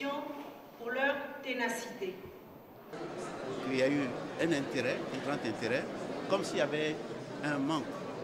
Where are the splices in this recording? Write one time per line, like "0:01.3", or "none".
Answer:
0:03.0